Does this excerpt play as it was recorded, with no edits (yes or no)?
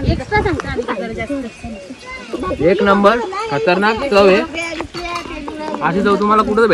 yes